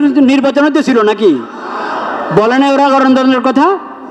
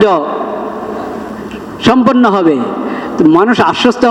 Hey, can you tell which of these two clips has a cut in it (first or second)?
second